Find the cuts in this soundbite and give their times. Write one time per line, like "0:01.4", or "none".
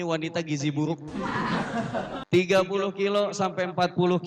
0:02.2